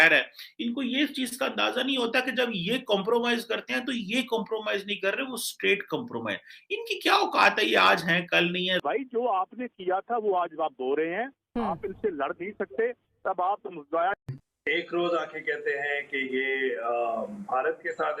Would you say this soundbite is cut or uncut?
cut